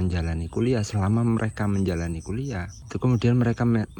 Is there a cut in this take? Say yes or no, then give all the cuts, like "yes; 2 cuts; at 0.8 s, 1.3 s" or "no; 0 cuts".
no; 0 cuts